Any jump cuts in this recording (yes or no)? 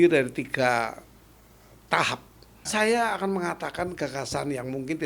yes